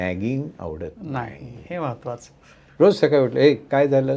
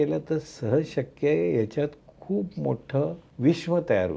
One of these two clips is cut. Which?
second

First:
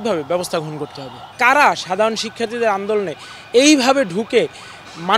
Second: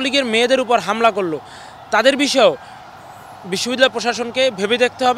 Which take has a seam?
first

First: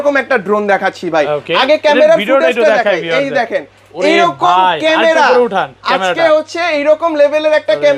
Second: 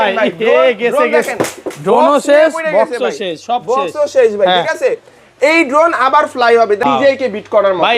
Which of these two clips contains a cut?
second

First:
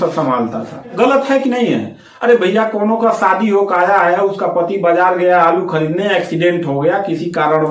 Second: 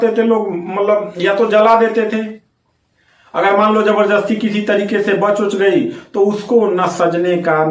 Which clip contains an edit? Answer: first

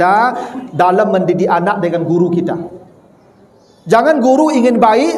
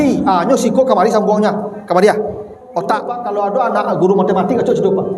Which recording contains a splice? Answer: second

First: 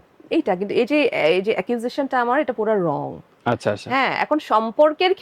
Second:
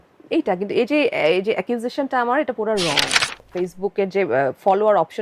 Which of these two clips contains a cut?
second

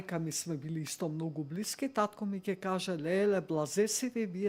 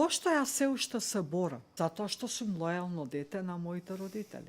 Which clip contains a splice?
second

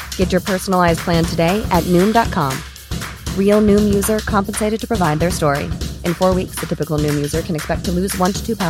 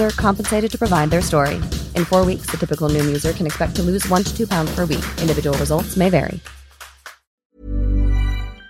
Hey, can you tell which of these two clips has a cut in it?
second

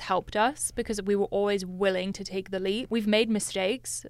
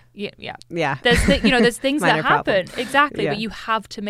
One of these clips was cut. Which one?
first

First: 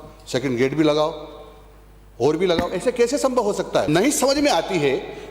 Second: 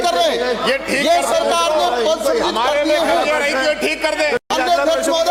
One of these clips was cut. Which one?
first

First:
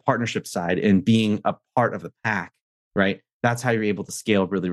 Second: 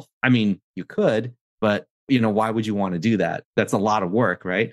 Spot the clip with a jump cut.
second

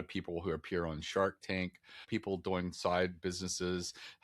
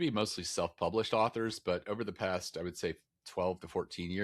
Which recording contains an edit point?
first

